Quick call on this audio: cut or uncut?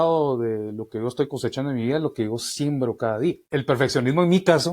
cut